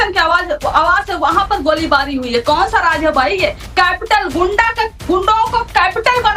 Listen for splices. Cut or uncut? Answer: uncut